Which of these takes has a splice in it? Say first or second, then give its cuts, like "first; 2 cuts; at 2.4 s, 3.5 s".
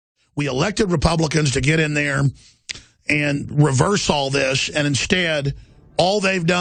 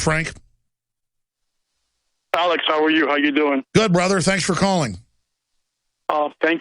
second; 1 cut; at 3.2 s